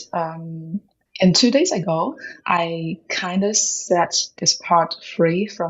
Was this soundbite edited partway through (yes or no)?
yes